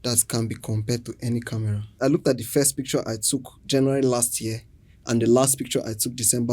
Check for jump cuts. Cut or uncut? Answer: cut